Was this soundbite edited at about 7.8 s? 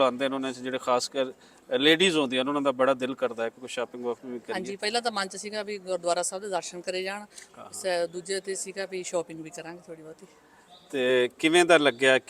no; 0 cuts

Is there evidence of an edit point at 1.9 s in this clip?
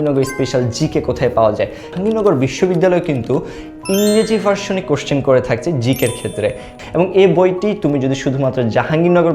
yes; 2 cuts; at 1.9 s, 6.7 s

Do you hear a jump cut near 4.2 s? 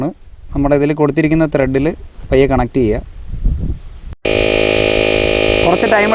yes; 1 cut; at 4.2 s

